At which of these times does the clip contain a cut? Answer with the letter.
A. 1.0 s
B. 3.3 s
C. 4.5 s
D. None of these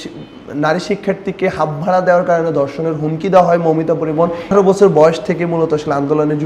C